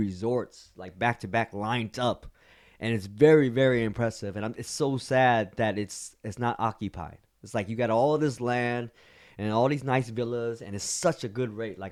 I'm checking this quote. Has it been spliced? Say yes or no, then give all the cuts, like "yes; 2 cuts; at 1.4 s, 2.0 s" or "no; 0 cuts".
no; 0 cuts